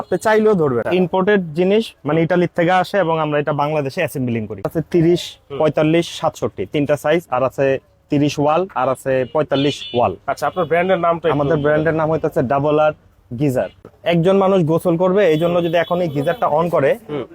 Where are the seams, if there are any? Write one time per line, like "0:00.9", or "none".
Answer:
0:00.8
0:04.7
0:13.9